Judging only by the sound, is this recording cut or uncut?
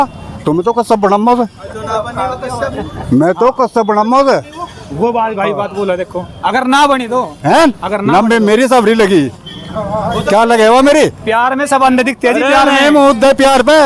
uncut